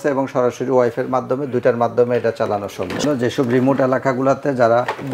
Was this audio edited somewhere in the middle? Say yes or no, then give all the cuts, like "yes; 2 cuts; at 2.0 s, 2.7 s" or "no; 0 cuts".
yes; 1 cut; at 3.0 s